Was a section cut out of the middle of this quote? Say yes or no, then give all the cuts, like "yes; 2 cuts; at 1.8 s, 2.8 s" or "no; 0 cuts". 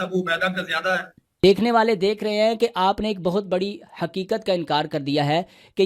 yes; 1 cut; at 1.2 s